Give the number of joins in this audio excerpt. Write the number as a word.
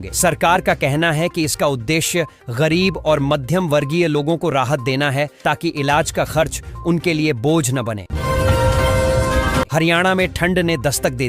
two